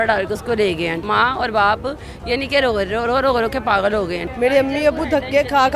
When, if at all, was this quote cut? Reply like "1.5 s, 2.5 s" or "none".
1.0 s, 4.2 s

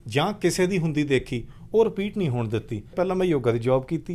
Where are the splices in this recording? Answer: 2.9 s

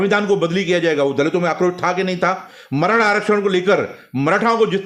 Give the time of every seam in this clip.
none

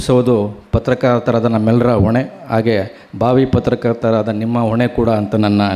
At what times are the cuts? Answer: none

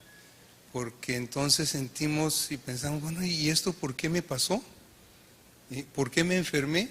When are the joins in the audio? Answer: 2.2 s

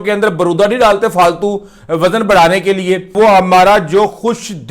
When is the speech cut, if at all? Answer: 3.1 s

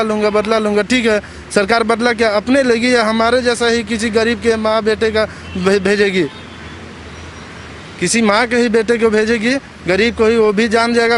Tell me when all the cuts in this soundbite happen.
none

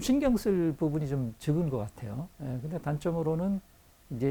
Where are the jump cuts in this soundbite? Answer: 2.3 s

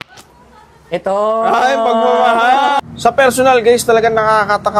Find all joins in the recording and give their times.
2.8 s

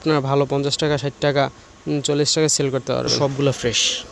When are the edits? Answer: 3.1 s

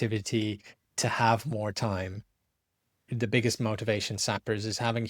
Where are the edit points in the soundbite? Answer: 3.1 s

